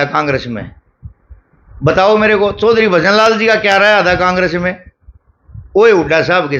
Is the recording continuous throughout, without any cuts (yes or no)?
yes